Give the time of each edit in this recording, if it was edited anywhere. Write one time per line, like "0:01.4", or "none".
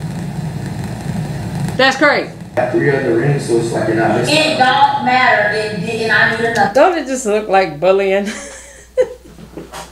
0:02.6